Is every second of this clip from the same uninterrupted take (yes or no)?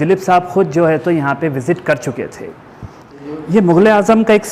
no